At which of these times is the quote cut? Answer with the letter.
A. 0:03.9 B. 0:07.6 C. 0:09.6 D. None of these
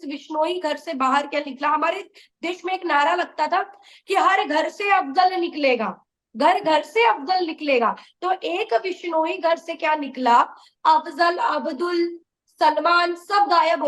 D